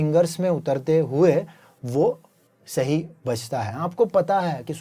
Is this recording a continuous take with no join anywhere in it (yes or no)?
no